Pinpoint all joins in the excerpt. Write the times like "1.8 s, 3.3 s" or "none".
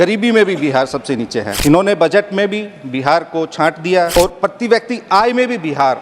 1.5 s, 4.1 s

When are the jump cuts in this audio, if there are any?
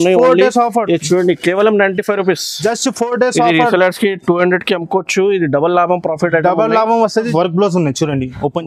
7.3 s

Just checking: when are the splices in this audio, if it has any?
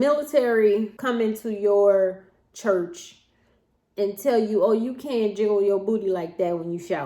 0.9 s

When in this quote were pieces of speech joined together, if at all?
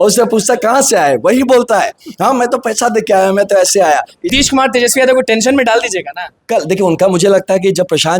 4.3 s

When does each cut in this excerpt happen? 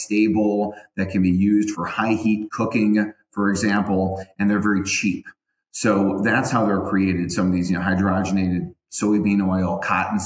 1.7 s

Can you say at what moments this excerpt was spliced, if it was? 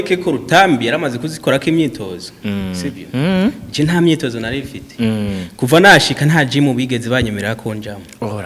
none

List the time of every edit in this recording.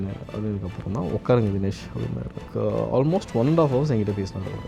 2.4 s

